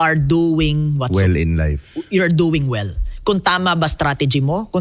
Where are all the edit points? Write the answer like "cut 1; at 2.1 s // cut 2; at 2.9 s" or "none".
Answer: none